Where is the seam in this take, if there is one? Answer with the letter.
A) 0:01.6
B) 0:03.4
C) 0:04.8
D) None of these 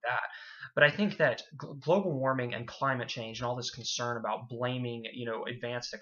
A